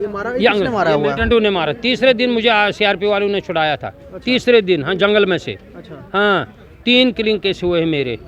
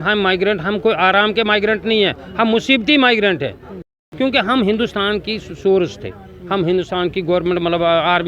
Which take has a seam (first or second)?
second